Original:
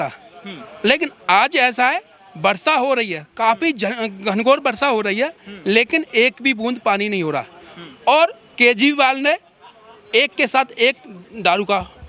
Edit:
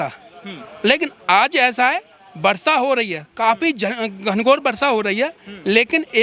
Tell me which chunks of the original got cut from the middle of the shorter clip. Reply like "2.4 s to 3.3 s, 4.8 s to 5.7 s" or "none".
none